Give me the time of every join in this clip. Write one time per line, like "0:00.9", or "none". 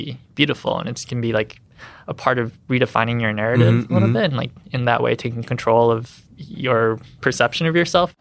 0:07.1